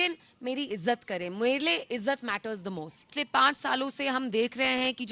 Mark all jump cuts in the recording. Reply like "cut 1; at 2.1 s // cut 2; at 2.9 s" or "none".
cut 1; at 3.0 s